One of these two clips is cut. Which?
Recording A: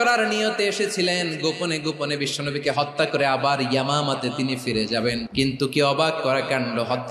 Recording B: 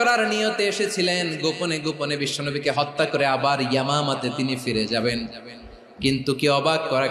A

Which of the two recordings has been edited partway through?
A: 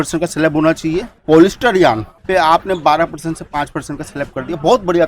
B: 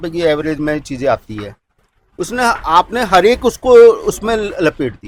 A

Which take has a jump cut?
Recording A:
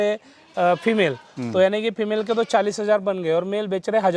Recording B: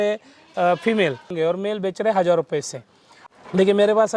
B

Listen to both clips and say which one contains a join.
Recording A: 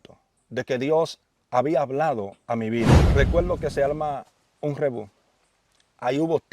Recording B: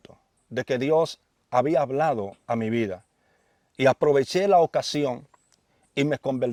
A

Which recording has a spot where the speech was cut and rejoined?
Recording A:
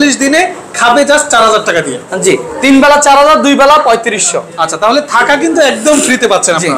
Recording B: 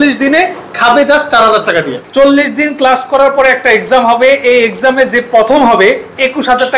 B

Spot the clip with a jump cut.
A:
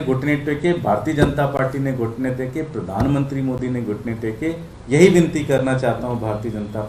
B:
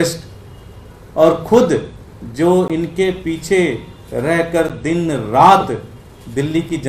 A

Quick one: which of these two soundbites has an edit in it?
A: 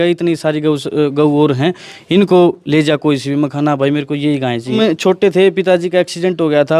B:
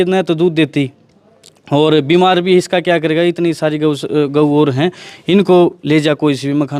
A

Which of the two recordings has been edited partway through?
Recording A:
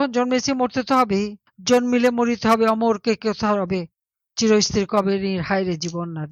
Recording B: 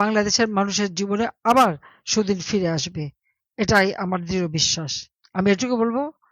B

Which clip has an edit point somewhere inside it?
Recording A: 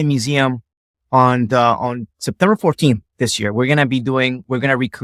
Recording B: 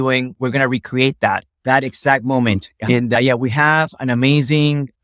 B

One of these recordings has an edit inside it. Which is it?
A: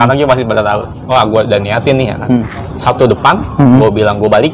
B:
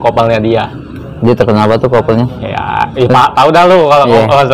A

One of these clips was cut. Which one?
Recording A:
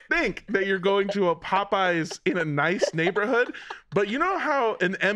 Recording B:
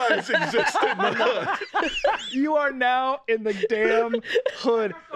B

